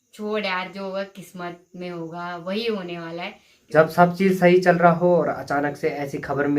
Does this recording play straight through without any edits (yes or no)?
no